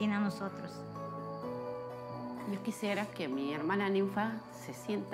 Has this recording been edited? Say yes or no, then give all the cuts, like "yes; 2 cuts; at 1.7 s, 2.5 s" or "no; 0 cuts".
no; 0 cuts